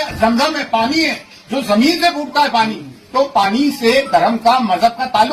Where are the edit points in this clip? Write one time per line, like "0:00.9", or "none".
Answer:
none